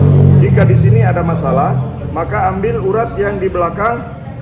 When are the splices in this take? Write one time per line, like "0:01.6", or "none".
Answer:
none